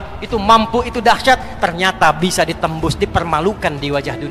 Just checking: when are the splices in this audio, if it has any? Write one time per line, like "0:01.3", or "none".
none

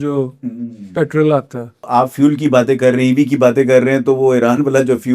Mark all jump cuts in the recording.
0:01.9

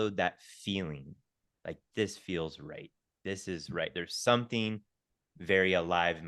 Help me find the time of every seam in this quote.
none

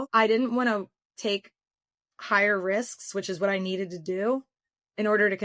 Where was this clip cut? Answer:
none

